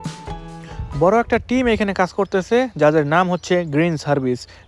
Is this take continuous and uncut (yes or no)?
yes